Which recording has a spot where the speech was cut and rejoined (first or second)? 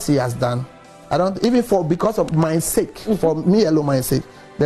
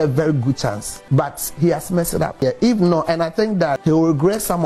second